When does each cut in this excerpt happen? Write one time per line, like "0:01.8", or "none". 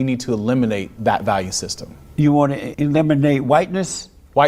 0:00.9
0:02.7